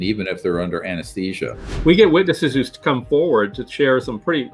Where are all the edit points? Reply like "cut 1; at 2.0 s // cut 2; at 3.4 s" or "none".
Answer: cut 1; at 1.6 s